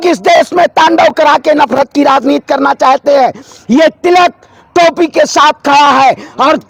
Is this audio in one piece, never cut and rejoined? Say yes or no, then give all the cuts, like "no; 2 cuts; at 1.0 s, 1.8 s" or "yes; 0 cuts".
yes; 0 cuts